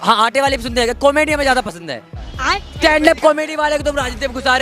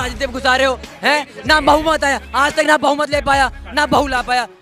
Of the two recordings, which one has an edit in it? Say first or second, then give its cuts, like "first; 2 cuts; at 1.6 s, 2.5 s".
first; 1 cut; at 2.3 s